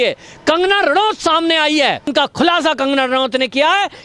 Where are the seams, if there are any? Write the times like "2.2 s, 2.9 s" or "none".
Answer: 2.1 s